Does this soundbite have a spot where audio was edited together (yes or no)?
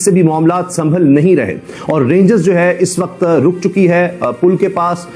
no